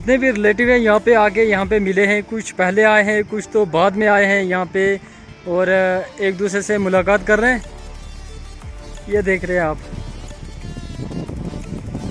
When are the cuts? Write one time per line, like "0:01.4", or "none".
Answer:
none